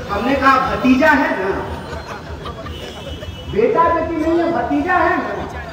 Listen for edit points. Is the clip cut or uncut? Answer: uncut